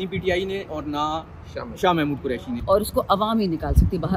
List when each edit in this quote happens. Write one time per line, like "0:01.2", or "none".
0:02.6